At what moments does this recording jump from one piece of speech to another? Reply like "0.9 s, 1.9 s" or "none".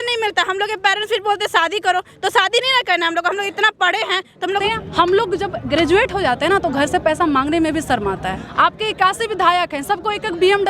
4.6 s, 8.4 s